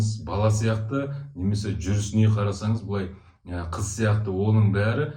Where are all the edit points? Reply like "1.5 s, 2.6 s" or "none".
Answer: none